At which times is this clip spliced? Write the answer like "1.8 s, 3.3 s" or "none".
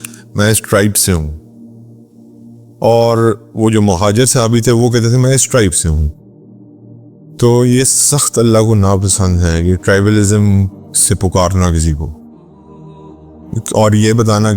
12.1 s, 13.5 s